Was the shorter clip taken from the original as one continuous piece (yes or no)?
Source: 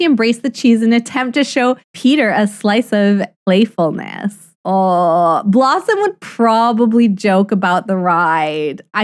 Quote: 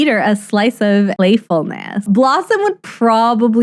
no